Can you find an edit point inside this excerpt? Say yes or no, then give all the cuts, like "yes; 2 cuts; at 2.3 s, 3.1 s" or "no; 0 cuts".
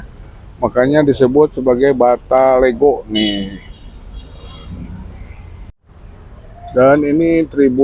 yes; 1 cut; at 5.8 s